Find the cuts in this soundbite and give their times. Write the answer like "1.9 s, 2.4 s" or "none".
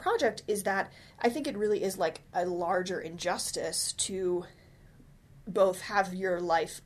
none